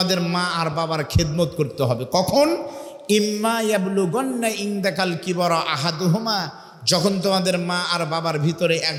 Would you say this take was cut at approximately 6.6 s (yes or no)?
no